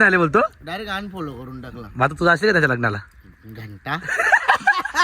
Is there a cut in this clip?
no; 0 cuts

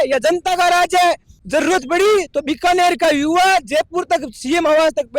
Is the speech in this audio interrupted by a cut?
yes; 1 cut; at 1.3 s

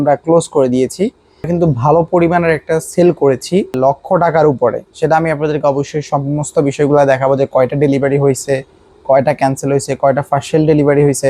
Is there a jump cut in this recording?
yes; 2 cuts; at 1.5 s, 3.8 s

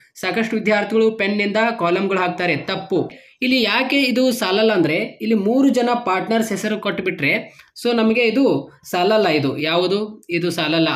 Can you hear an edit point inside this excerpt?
yes; 1 cut; at 3.2 s

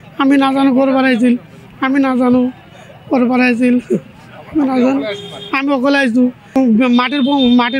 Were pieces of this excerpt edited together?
yes; 1 cut; at 6.6 s

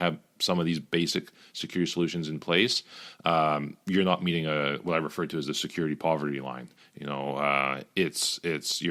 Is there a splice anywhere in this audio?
no; 0 cuts

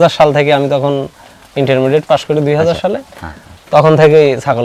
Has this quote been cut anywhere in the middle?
no; 0 cuts

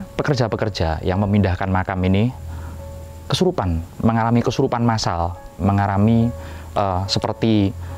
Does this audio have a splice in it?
no; 0 cuts

